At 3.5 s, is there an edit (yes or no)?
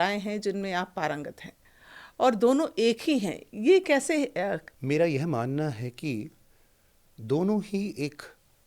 no